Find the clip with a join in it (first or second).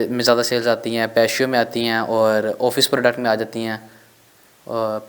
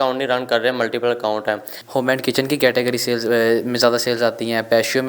second